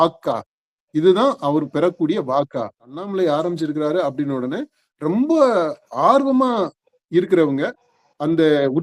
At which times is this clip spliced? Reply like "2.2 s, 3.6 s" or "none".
3.0 s